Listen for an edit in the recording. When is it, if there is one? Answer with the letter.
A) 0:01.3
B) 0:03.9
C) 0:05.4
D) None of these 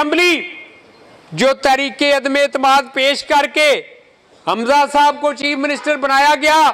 D